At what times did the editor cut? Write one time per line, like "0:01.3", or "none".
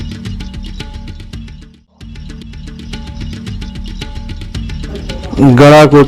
0:02.3